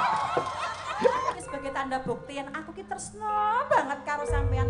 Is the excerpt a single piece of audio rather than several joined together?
no; 1 cut; at 1.4 s

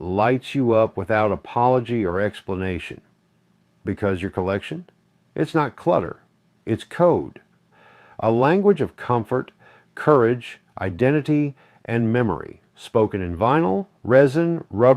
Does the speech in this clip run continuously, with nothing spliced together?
yes; 0 cuts

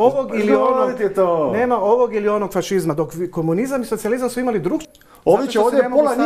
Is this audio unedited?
no; 1 cut; at 4.8 s

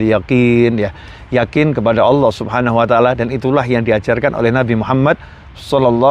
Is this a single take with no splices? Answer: yes; 0 cuts

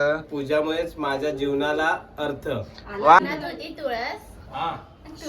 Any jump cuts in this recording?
yes; 1 cut; at 3.2 s

